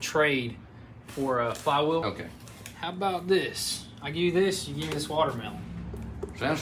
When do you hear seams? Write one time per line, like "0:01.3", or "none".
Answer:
none